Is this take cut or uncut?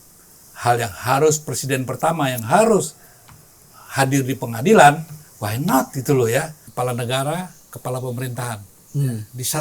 cut